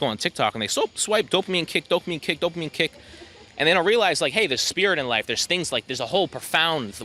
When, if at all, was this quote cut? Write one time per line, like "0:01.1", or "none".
none